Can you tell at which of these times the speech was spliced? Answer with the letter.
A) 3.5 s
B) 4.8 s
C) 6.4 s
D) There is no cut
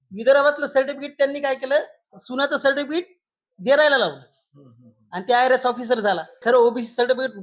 C